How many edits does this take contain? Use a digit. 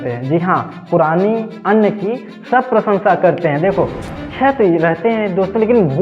1